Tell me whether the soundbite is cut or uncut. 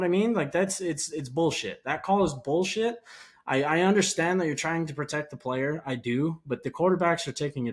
uncut